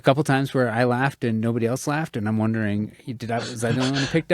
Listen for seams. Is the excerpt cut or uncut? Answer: uncut